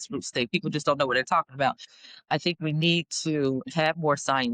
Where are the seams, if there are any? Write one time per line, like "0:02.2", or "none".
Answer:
0:01.9